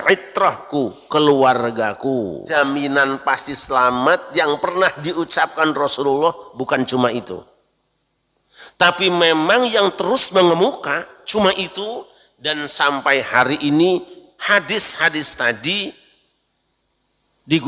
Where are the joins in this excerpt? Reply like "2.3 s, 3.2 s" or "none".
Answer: 2.5 s